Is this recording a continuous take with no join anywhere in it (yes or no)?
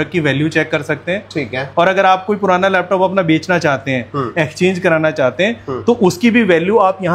yes